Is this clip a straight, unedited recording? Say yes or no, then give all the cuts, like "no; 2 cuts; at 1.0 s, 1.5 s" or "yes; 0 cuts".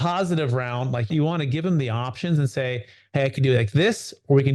no; 1 cut; at 1.1 s